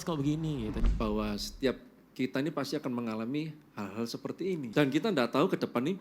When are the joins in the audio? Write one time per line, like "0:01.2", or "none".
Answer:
0:00.8
0:04.7